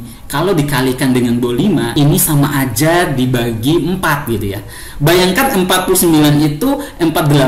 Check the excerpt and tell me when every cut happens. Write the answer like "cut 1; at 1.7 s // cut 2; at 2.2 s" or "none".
cut 1; at 1.9 s